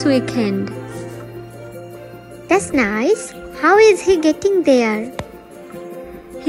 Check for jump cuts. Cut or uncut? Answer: cut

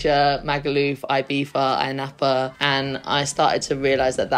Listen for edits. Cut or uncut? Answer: cut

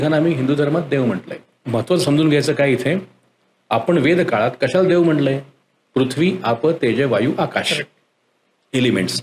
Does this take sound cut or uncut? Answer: cut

